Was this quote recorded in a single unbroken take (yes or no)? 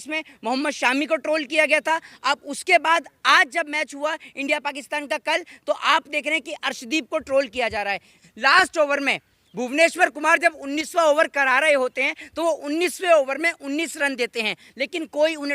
no